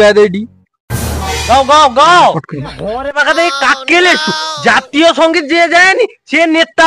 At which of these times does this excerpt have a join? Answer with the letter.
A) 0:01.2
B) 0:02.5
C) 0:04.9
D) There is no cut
B